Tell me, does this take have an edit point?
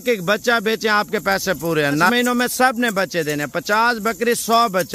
yes; 1 cut; at 2.1 s

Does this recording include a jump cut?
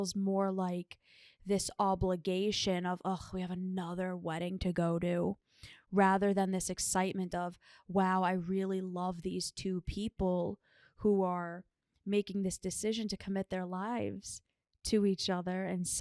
no; 0 cuts

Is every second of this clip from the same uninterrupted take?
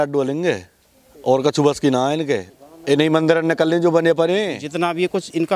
no; 1 cut; at 4.6 s

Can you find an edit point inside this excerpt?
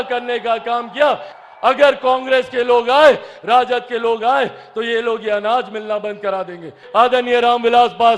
yes; 2 cuts; at 1.3 s, 6.8 s

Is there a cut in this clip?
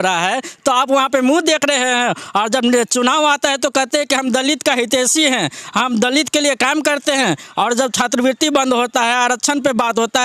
no; 0 cuts

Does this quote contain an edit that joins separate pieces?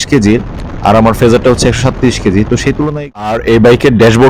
yes; 1 cut; at 3.0 s

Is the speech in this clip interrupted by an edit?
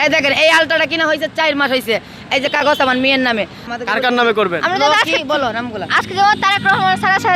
yes; 1 cut; at 3.7 s

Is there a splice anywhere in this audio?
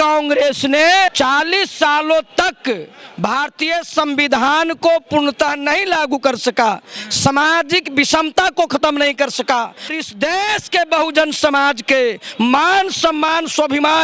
yes; 2 cuts; at 1.1 s, 9.9 s

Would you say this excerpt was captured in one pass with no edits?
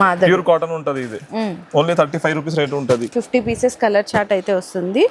no; 1 cut; at 3.1 s

